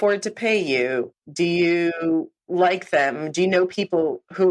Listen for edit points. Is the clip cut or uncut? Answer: uncut